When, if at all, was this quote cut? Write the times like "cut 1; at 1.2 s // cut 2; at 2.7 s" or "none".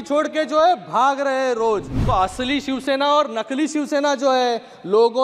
cut 1; at 1.9 s

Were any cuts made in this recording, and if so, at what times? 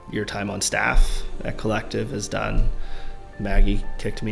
none

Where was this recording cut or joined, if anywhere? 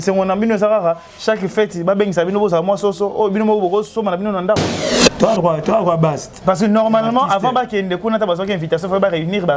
cut 1; at 5.0 s

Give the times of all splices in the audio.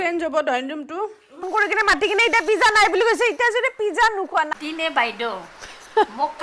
cut 1; at 1.5 s // cut 2; at 4.5 s

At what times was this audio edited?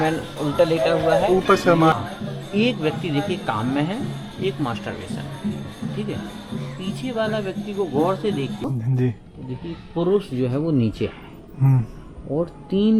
cut 1; at 1.9 s // cut 2; at 8.6 s

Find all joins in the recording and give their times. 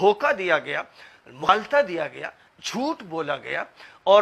cut 1; at 1.4 s

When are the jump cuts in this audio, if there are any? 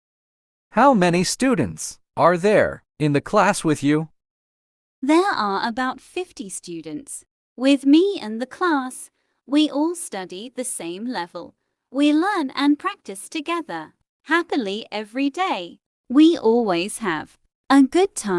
none

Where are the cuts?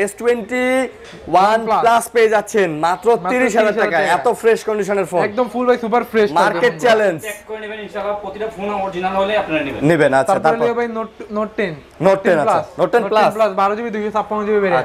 none

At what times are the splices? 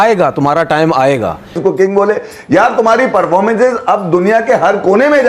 cut 1; at 1.6 s

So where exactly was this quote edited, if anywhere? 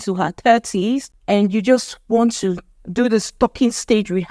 cut 1; at 1.1 s

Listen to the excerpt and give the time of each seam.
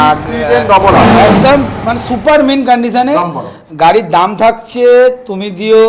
none

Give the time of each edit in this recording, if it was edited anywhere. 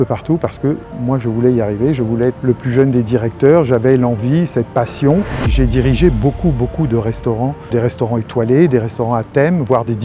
cut 1; at 2.4 s // cut 2; at 5.5 s // cut 3; at 7.7 s

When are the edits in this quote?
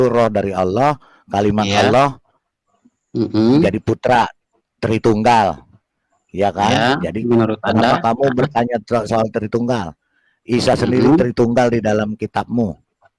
none

